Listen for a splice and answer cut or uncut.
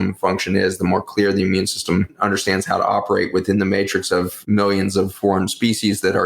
cut